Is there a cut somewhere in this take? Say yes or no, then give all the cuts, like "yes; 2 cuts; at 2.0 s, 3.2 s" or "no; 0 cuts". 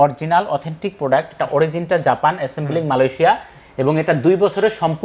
no; 0 cuts